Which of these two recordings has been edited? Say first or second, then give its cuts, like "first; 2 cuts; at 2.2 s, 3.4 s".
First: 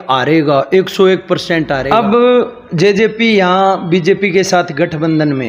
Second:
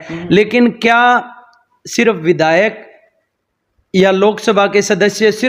first; 1 cut; at 1.8 s